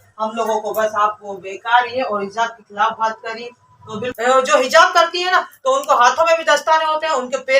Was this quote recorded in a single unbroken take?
no; 1 cut; at 4.1 s

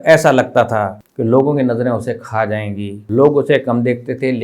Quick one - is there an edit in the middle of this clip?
yes; 2 cuts; at 1.0 s, 2.9 s

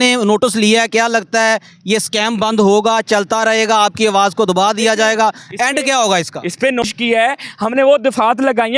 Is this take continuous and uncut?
no; 1 cut; at 6.8 s

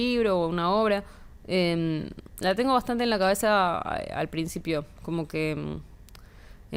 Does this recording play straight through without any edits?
yes; 0 cuts

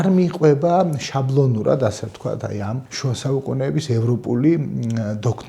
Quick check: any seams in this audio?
yes; 1 cut; at 2.9 s

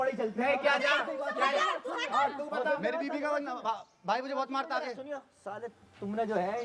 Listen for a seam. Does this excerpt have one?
no; 0 cuts

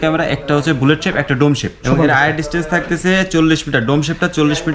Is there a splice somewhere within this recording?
yes; 1 cut; at 1.9 s

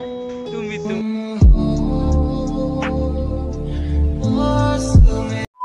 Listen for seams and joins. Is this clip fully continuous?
yes; 0 cuts

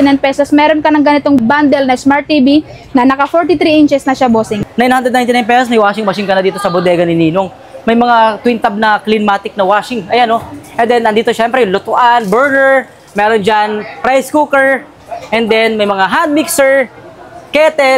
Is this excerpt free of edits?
no; 2 cuts; at 1.4 s, 4.6 s

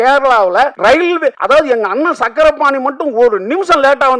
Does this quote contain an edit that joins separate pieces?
yes; 1 cut; at 1.0 s

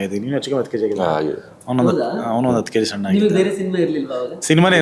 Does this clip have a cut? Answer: no; 0 cuts

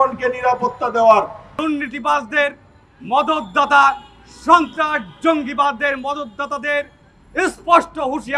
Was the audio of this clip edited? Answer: yes; 1 cut; at 1.5 s

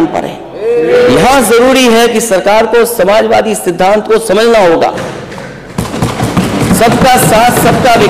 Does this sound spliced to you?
yes; 1 cut; at 0.9 s

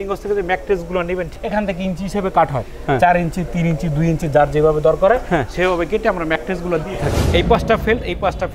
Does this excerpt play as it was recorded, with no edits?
no; 2 cuts; at 1.3 s, 7.2 s

